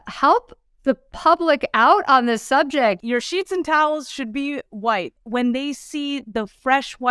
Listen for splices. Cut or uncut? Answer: cut